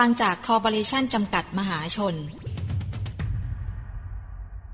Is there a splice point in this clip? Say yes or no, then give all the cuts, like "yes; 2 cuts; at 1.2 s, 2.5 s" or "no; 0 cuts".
yes; 1 cut; at 2.5 s